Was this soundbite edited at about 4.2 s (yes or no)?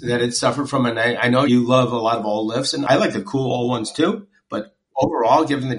no